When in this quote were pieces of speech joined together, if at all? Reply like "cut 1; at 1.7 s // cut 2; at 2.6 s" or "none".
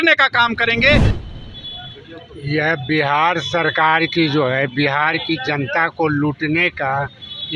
cut 1; at 1.1 s